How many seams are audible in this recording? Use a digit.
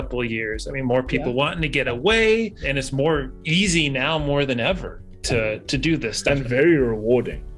2